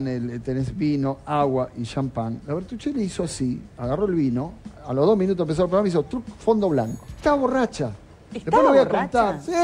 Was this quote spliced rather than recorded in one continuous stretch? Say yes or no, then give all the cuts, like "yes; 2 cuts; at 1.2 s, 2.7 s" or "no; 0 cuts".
no; 0 cuts